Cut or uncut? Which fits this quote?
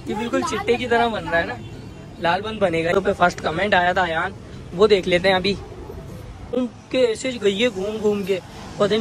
cut